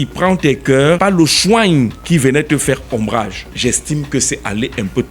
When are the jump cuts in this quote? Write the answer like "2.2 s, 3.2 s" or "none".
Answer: 1.0 s, 2.0 s, 3.4 s

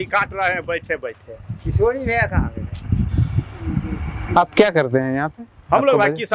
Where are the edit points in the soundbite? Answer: none

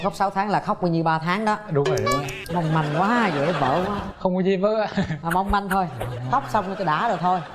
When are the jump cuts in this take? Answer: none

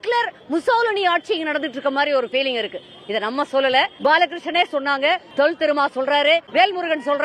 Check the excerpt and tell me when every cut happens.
3.9 s, 5.3 s, 6.5 s

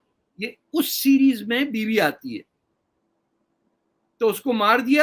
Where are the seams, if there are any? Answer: none

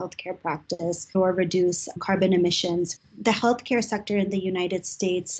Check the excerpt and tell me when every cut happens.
1.1 s, 3.0 s

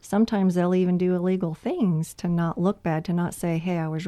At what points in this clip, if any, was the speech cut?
none

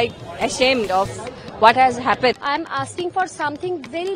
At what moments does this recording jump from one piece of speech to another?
2.4 s

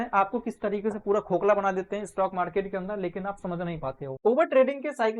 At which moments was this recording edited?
4.2 s

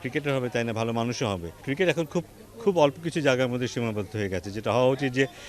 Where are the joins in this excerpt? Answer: 1.6 s

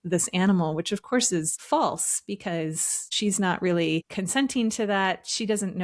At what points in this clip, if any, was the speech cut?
1.6 s, 3.1 s, 4.1 s

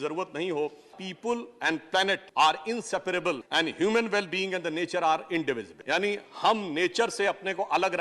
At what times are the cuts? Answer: 1.1 s, 2.2 s, 3.4 s, 5.7 s

